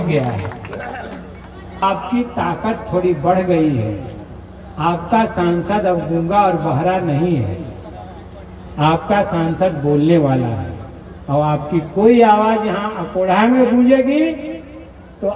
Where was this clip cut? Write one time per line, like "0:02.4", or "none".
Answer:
0:01.8